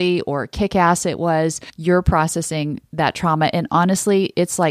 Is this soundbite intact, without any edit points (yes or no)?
no